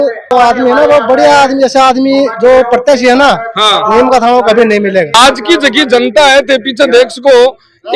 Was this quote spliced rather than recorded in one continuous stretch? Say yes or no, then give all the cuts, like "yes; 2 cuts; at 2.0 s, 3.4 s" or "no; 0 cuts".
yes; 1 cut; at 5.1 s